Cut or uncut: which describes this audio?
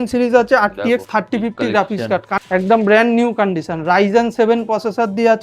cut